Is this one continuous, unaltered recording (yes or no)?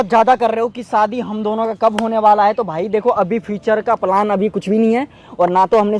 yes